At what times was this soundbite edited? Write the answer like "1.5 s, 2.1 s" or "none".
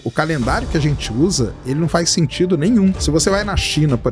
3.0 s